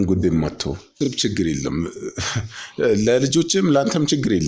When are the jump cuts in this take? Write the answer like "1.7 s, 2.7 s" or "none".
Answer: 1.0 s